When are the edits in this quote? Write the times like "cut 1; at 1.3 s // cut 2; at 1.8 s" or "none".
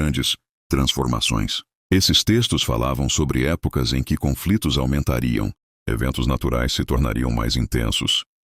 cut 1; at 1.7 s